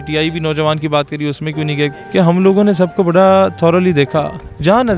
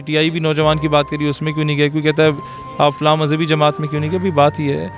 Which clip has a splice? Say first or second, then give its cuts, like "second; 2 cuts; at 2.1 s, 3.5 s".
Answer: first; 1 cut; at 1.9 s